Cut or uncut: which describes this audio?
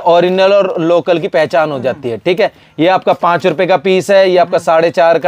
uncut